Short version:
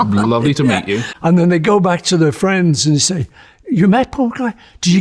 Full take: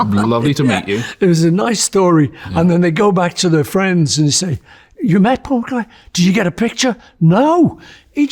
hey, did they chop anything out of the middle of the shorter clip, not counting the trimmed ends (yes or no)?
yes